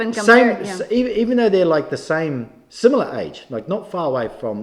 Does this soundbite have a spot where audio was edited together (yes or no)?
no